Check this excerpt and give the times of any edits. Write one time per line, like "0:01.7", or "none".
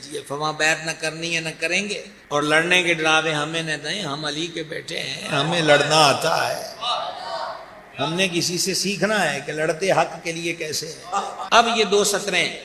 0:02.1
0:11.5